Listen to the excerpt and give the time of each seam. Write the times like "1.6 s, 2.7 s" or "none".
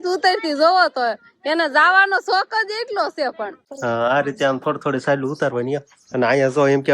3.7 s